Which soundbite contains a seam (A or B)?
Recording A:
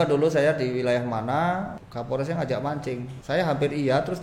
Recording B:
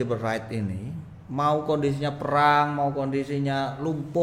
A